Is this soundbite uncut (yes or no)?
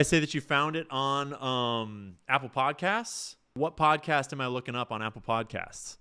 no